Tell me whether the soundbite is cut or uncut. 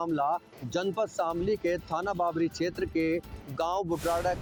uncut